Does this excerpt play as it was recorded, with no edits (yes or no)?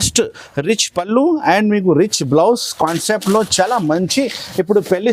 yes